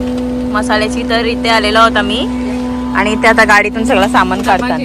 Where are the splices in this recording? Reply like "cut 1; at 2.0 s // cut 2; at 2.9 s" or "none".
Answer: none

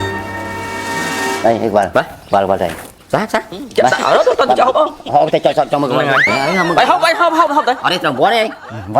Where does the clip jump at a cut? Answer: cut 1; at 6.3 s

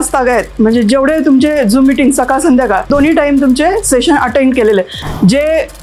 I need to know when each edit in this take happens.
cut 1; at 2.9 s // cut 2; at 5.0 s

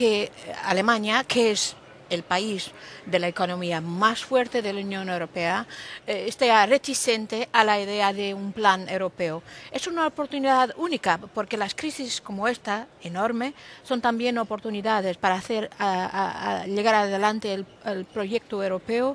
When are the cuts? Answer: cut 1; at 12.1 s

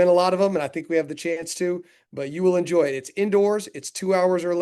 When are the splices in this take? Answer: none

